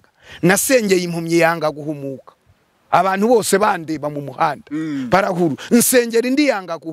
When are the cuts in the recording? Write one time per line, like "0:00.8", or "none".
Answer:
none